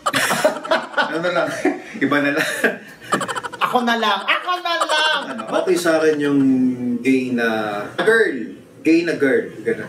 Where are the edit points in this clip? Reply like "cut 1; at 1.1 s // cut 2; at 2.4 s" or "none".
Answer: cut 1; at 5.4 s // cut 2; at 8.0 s